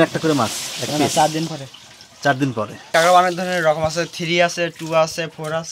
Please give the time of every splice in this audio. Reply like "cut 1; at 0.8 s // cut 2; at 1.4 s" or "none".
cut 1; at 2.9 s